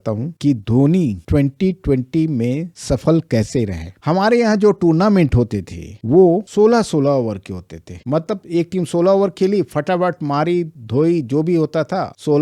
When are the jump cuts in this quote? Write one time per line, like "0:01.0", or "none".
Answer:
none